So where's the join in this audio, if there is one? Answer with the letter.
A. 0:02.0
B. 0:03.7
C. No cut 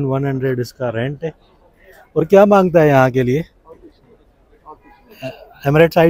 C